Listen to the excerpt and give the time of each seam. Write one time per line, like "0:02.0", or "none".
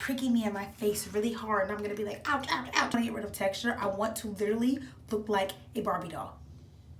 0:02.9